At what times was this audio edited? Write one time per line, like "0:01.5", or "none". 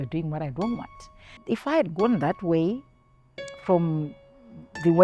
0:01.3